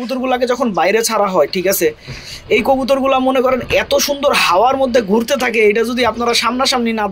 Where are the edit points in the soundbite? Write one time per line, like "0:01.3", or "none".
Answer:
none

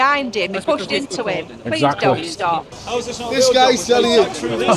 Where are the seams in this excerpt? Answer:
0:02.8

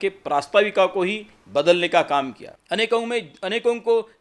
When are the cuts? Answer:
0:02.5

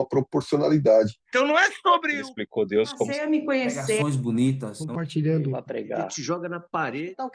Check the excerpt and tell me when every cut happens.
0:01.2

